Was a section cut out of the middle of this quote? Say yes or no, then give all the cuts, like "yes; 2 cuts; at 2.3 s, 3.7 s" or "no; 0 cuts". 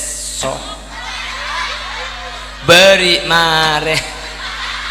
no; 0 cuts